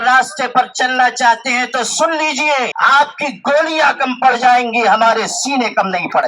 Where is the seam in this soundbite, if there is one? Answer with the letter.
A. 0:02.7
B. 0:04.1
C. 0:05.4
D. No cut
A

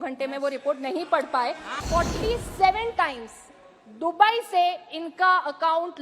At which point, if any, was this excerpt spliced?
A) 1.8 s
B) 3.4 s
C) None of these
A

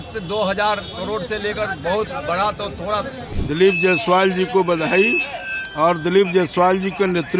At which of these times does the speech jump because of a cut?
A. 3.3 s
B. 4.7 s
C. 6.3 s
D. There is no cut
A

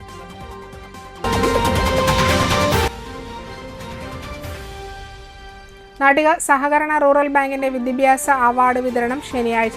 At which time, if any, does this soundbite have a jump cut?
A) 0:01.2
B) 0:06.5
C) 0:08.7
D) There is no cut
A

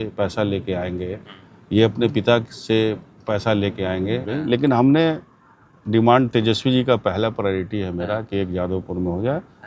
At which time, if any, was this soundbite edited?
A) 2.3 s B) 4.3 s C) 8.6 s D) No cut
B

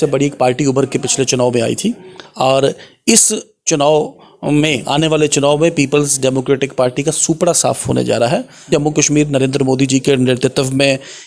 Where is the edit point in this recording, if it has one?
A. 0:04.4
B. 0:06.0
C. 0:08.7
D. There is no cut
C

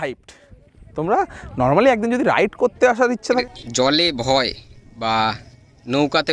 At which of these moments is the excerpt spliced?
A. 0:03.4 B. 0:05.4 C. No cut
A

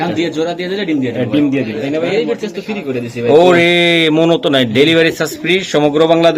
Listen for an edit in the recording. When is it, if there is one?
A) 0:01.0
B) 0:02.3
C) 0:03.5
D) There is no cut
B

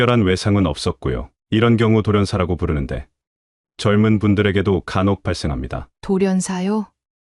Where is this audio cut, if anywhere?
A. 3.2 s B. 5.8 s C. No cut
C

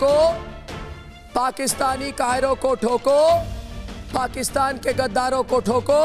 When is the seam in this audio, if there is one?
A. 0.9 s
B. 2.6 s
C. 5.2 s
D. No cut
D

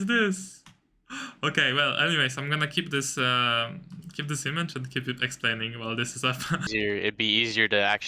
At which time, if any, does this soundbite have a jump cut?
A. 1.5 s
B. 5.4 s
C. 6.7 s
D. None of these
C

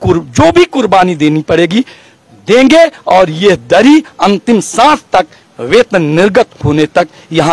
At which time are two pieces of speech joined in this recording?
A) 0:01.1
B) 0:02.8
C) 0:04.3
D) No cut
D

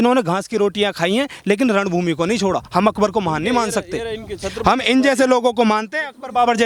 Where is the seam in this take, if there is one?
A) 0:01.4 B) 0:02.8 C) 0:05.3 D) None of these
D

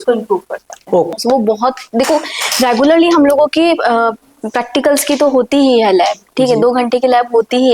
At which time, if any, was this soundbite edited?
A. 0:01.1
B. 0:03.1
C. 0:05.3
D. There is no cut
A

